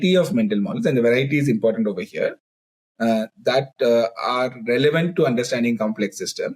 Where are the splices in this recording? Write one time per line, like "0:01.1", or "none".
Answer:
none